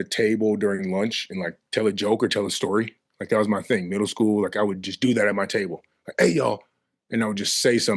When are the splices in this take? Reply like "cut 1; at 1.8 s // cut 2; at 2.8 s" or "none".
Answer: none